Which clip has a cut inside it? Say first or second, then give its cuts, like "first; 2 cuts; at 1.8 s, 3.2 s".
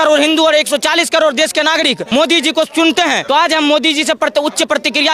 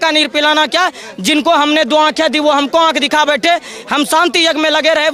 first; 2 cuts; at 2.0 s, 3.2 s